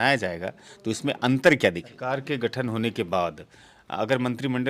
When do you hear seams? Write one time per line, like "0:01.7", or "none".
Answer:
0:01.9

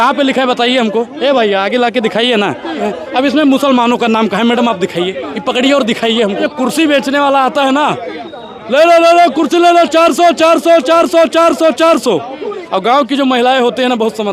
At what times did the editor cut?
0:02.9
0:06.4

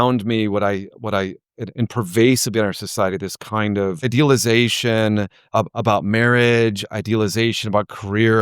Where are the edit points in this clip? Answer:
0:04.1
0:05.4

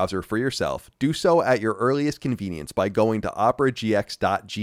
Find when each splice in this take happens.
none

